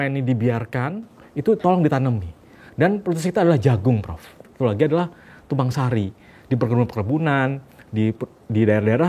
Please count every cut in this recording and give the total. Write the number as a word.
one